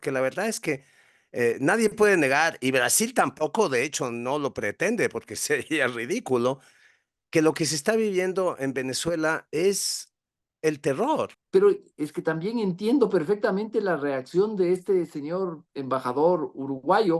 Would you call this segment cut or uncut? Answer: cut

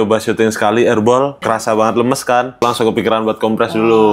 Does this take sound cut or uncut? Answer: cut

